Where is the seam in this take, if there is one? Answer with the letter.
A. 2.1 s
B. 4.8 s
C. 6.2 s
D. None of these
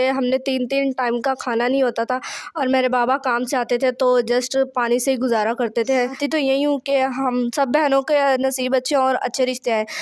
C